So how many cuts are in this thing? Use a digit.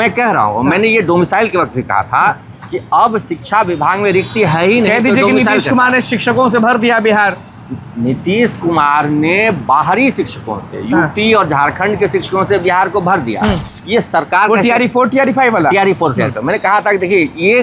1